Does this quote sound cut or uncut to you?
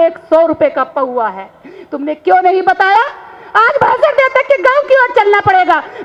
uncut